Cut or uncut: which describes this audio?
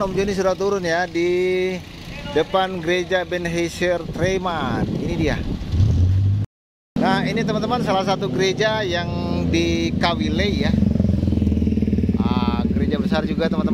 cut